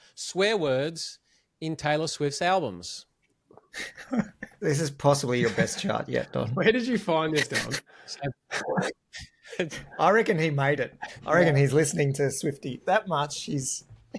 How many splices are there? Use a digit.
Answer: 0